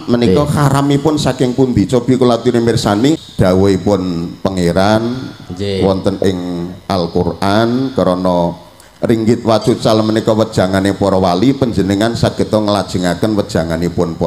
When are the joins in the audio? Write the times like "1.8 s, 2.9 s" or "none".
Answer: 3.3 s